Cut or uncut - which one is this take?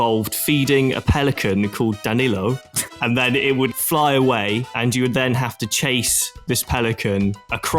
cut